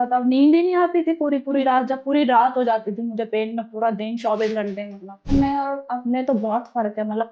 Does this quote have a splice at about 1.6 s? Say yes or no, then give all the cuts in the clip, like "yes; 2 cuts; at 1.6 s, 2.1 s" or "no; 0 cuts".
no; 1 cut; at 5.3 s